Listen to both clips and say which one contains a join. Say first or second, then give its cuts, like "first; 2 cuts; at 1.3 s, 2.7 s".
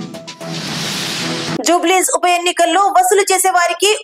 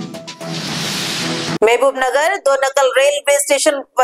second; 1 cut; at 1.6 s